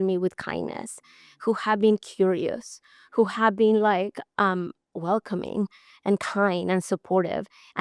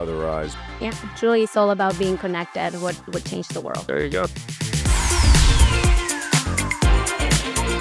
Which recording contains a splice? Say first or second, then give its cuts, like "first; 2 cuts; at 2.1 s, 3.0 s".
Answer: second; 2 cuts; at 0.8 s, 4.6 s